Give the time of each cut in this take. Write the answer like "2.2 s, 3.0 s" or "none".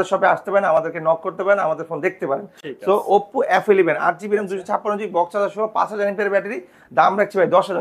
none